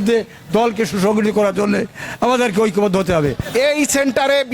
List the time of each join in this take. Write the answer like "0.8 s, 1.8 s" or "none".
3.4 s